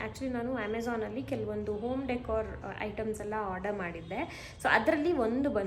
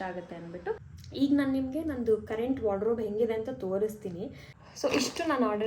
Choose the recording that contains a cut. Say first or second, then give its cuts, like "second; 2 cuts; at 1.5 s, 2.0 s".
second; 2 cuts; at 1.0 s, 4.6 s